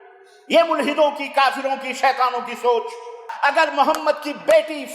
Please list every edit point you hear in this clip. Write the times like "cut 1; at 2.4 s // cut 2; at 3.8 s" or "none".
cut 1; at 3.3 s